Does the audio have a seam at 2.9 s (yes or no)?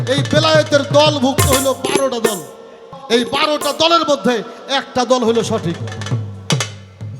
yes